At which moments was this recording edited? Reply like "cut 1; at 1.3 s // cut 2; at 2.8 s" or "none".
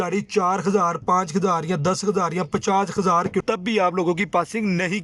cut 1; at 3.4 s